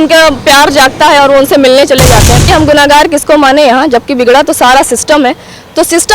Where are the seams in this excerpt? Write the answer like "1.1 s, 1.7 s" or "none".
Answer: 2.4 s